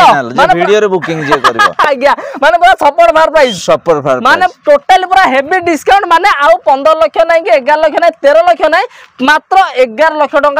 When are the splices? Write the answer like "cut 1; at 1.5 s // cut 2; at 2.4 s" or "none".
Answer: none

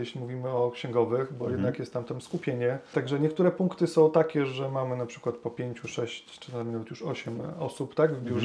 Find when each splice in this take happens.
cut 1; at 2.9 s

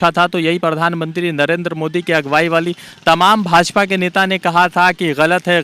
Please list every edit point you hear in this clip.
none

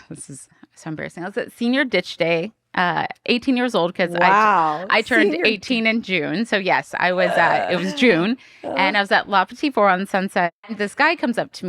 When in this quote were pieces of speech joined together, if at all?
cut 1; at 10.7 s

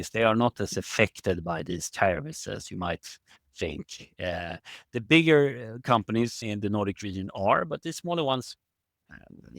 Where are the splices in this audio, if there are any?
cut 1; at 2.6 s // cut 2; at 6.4 s

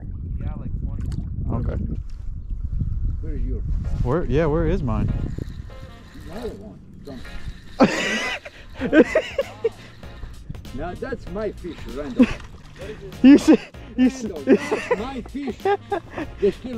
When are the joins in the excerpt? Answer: cut 1; at 1.9 s

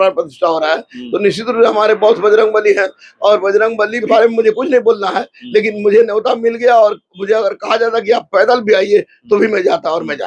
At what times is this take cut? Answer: cut 1; at 4.0 s

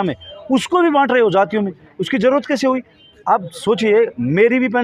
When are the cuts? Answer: none

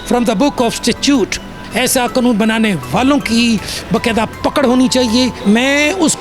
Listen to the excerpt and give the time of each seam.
cut 1; at 1.5 s // cut 2; at 5.4 s

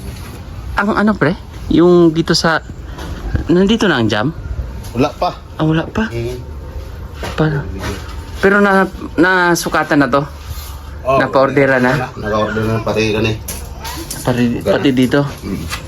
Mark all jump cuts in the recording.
none

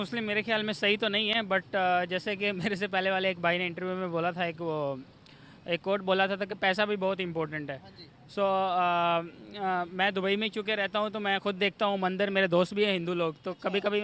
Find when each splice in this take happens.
none

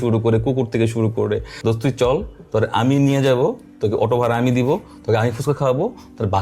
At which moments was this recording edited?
cut 1; at 1.5 s

